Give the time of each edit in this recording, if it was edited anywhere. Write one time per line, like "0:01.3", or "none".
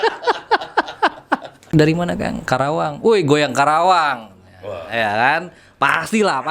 0:01.7